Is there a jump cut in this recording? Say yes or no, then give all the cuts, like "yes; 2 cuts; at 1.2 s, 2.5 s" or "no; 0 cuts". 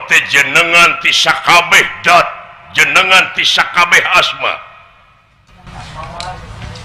no; 0 cuts